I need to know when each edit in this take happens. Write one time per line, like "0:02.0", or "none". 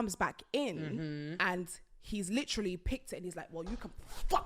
0:01.3